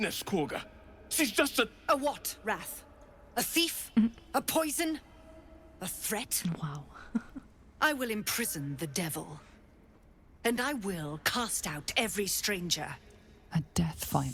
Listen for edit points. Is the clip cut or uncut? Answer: uncut